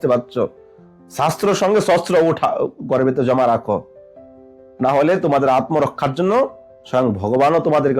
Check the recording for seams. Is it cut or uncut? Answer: uncut